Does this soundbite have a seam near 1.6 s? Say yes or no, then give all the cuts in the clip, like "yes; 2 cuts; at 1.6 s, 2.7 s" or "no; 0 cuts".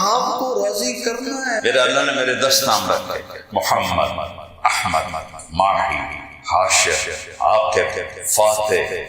yes; 1 cut; at 1.6 s